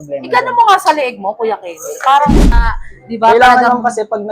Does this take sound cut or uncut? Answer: cut